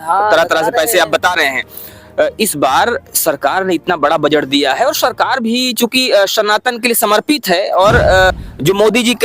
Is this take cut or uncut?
cut